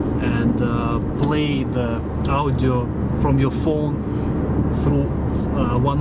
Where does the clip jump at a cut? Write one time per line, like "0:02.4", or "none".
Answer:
none